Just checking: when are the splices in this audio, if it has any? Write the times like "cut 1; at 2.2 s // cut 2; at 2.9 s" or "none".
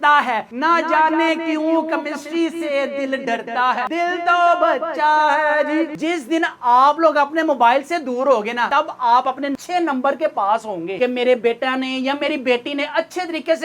cut 1; at 5.9 s // cut 2; at 9.6 s // cut 3; at 11.0 s